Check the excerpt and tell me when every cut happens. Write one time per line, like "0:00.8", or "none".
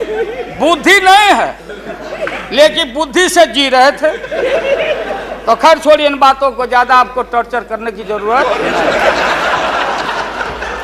none